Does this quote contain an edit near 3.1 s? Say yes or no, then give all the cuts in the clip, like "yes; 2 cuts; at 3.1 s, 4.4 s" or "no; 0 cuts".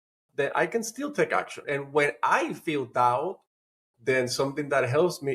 no; 1 cut; at 1.6 s